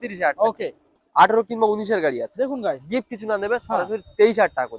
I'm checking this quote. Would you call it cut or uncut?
cut